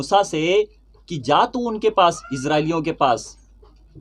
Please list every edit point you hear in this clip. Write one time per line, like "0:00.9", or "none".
none